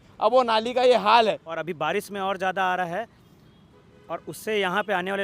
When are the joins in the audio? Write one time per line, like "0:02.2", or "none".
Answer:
0:01.5